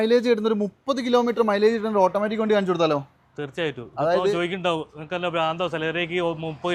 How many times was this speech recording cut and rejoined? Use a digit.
0